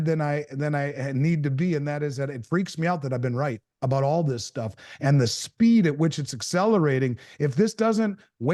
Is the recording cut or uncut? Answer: uncut